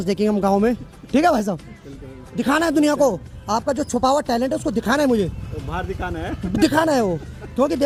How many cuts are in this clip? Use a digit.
0